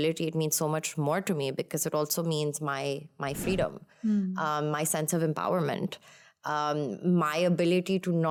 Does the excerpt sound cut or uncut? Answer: uncut